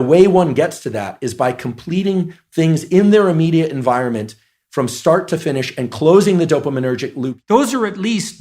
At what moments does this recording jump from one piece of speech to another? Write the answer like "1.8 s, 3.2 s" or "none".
7.3 s